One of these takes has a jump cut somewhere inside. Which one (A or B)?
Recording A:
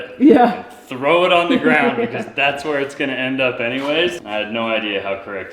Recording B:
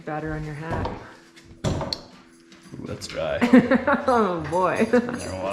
A